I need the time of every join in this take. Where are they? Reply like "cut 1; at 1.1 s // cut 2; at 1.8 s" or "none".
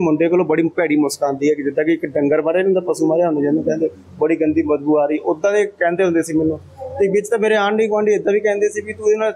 none